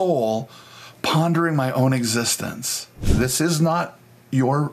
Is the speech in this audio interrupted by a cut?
yes; 1 cut; at 3.0 s

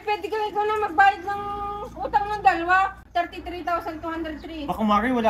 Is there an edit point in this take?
yes; 1 cut; at 3.0 s

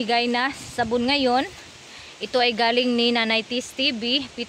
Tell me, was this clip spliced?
no; 0 cuts

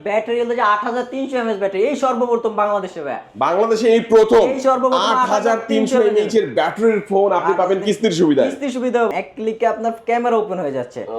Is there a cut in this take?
yes; 1 cut; at 9.1 s

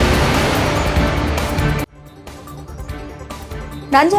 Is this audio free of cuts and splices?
yes; 0 cuts

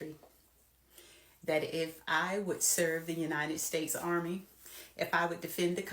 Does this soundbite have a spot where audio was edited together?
no; 0 cuts

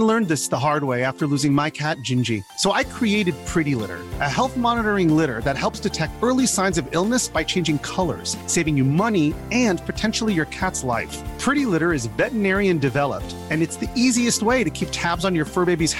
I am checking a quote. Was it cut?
no; 0 cuts

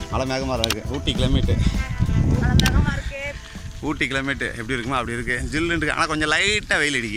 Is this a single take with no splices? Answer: yes; 0 cuts

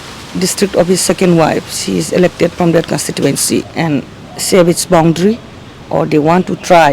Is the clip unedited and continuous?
no; 1 cut; at 3.7 s

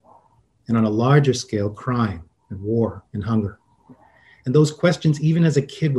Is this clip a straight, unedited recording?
yes; 0 cuts

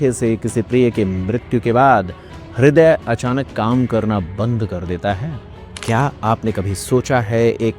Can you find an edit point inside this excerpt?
yes; 1 cut; at 5.7 s

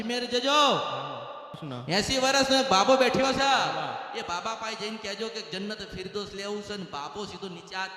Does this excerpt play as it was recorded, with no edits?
no; 1 cut; at 1.7 s

